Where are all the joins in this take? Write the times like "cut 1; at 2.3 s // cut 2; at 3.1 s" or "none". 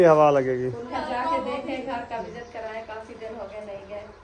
cut 1; at 0.9 s